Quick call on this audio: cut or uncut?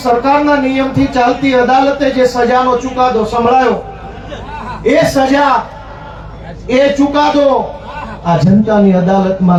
uncut